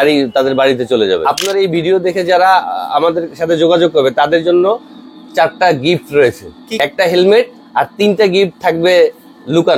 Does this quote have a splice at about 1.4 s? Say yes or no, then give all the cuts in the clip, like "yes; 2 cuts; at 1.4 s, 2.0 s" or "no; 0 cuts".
yes; 2 cuts; at 1.4 s, 6.8 s